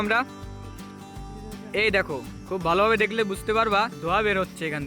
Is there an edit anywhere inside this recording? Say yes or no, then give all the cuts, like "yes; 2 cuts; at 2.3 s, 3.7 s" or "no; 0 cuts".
yes; 1 cut; at 4.0 s